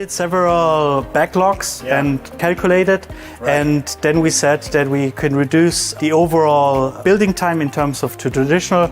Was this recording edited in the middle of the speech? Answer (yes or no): yes